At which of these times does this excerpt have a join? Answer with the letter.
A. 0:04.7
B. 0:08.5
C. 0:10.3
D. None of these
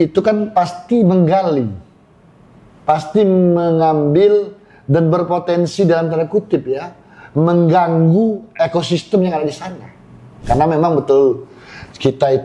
C